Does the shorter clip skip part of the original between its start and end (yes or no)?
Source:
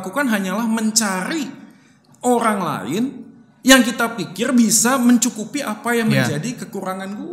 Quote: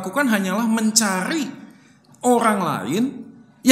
no